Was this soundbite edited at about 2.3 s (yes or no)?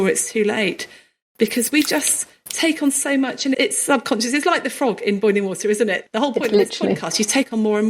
no